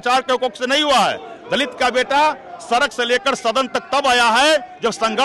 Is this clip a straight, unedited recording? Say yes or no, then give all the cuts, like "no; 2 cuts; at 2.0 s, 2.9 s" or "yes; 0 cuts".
yes; 0 cuts